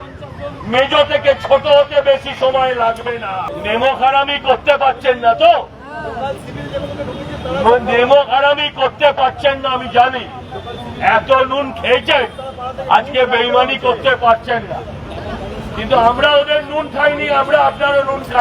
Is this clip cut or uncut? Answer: cut